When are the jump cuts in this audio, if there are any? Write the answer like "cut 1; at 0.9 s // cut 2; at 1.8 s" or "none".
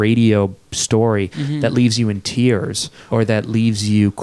cut 1; at 3.0 s